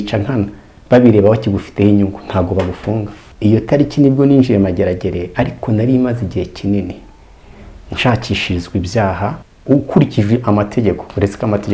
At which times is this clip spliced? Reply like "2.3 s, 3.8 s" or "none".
3.2 s, 9.5 s